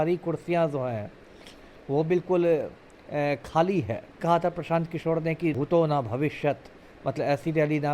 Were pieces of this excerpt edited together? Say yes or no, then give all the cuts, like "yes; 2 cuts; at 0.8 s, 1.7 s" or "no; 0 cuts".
yes; 2 cuts; at 4.2 s, 5.5 s